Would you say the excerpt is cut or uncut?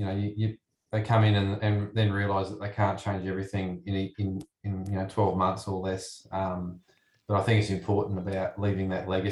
uncut